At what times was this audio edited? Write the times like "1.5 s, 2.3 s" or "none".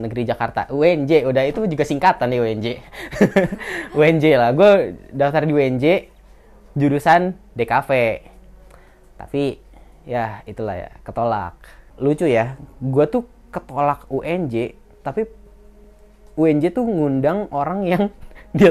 11.9 s

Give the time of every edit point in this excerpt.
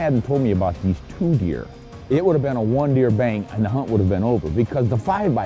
none

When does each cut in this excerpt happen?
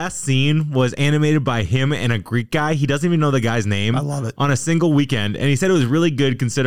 none

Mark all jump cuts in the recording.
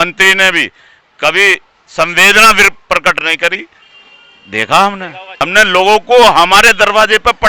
5.2 s

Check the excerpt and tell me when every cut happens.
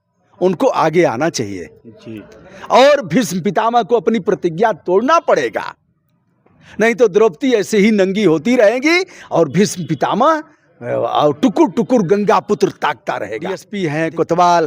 13.7 s

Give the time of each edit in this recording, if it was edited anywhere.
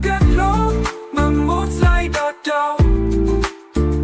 none

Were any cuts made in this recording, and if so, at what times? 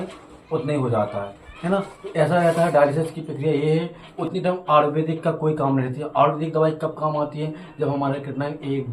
4.0 s

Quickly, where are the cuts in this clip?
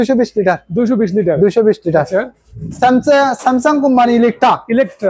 none

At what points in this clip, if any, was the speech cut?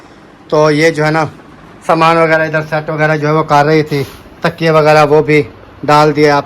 none

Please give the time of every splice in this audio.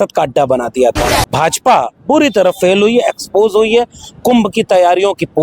1.2 s

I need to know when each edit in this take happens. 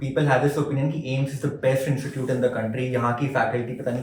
none

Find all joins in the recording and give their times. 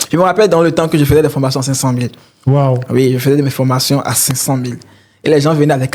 none

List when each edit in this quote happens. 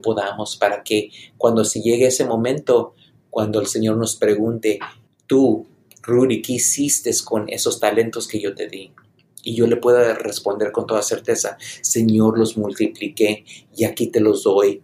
none

